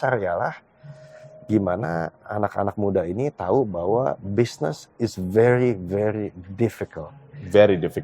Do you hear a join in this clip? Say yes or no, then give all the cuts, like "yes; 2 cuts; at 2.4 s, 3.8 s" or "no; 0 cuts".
no; 0 cuts